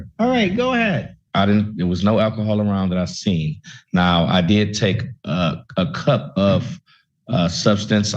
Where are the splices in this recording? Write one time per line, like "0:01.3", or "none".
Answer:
0:01.2